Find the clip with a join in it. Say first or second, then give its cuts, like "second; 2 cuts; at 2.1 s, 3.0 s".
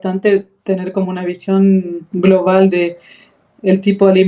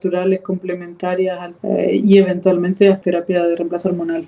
second; 2 cuts; at 1.5 s, 3.0 s